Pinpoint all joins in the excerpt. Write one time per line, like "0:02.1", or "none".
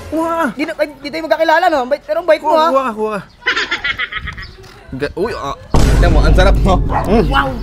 none